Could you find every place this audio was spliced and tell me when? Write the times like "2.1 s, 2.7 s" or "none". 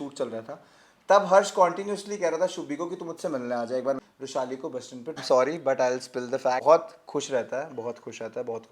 4.0 s, 5.2 s, 6.6 s